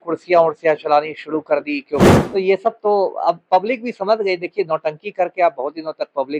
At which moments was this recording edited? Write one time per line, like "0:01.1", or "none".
0:02.1